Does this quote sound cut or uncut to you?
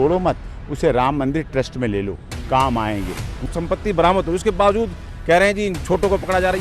cut